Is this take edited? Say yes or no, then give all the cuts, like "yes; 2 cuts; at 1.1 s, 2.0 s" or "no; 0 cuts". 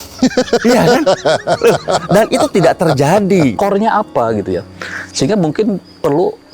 yes; 1 cut; at 3.6 s